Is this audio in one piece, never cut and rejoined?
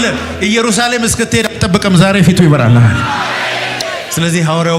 no; 1 cut; at 3.8 s

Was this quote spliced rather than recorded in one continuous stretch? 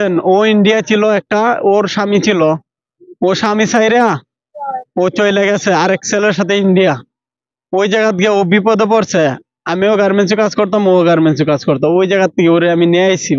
no; 0 cuts

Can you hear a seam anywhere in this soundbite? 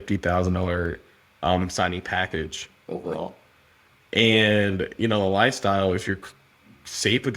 no; 0 cuts

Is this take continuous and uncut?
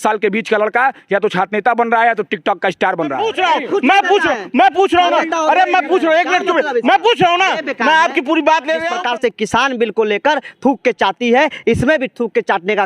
no; 2 cuts; at 3.2 s, 8.9 s

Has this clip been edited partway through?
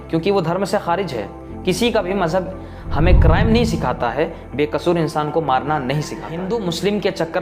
yes; 1 cut; at 6.3 s

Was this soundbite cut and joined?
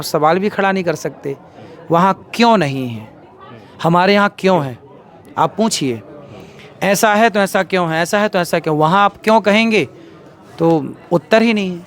no; 0 cuts

